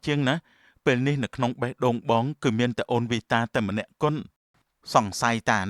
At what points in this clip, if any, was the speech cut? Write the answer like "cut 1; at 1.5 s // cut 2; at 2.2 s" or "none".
cut 1; at 4.2 s